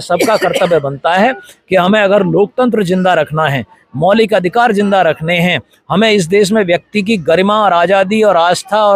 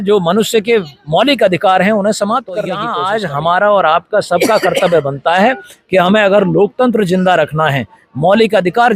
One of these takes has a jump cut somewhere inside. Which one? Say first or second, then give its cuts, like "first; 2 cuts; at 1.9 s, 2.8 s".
second; 1 cut; at 2.9 s